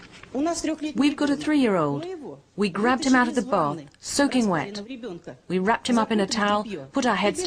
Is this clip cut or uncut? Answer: uncut